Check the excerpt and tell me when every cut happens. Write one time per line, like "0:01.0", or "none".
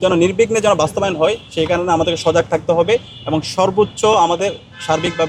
none